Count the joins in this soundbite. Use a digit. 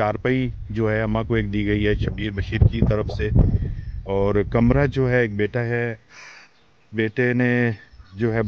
0